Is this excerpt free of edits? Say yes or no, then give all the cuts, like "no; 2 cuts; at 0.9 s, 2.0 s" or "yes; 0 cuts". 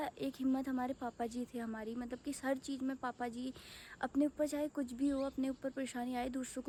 yes; 0 cuts